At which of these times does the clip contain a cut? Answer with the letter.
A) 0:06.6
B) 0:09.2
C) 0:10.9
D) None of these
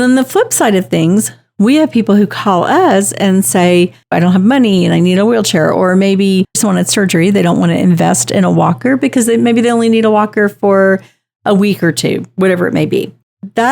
A